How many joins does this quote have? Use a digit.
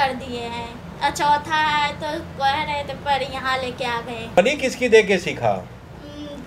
1